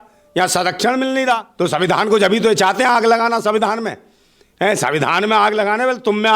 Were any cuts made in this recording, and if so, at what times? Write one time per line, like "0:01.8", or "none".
0:01.5